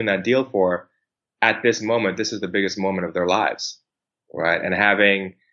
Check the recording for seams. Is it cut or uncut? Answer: uncut